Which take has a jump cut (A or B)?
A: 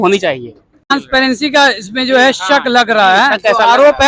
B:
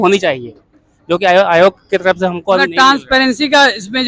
A